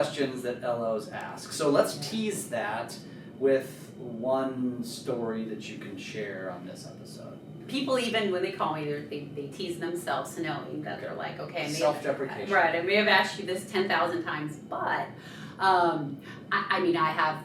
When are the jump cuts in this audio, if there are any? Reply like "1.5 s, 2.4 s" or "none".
7.6 s